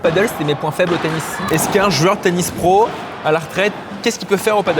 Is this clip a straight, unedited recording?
no; 2 cuts; at 1.4 s, 3.9 s

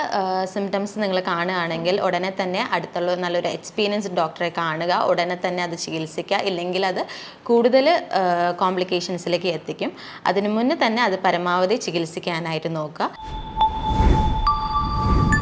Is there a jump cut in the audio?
yes; 1 cut; at 13.2 s

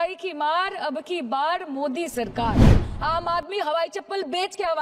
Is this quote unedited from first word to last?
no; 1 cut; at 2.9 s

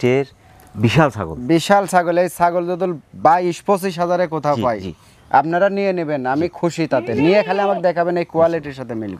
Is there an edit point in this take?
no; 0 cuts

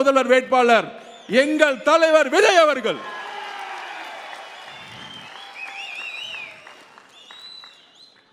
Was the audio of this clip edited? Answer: no; 0 cuts

